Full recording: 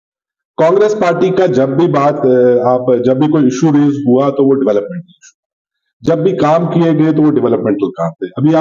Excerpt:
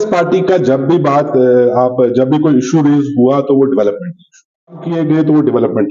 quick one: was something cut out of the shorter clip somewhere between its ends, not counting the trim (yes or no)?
yes